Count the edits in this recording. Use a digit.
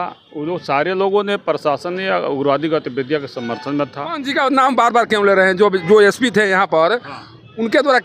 1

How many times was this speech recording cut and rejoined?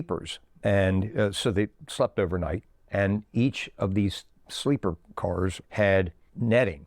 2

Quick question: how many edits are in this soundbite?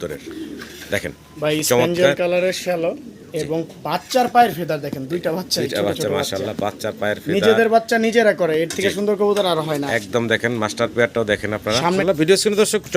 1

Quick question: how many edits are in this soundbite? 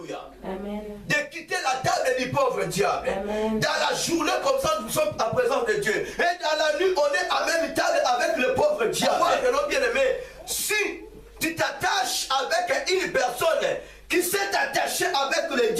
1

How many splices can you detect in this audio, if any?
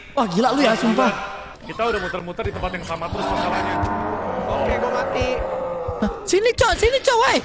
1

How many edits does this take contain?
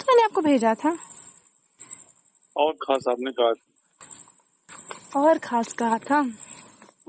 1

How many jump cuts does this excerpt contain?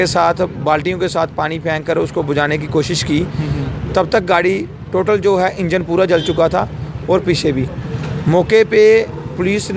0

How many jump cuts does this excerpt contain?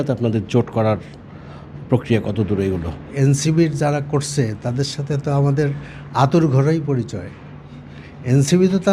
0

